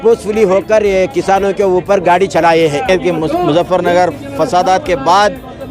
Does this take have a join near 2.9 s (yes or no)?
yes